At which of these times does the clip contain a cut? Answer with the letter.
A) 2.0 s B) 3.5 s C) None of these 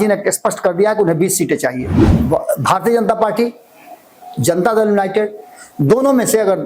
A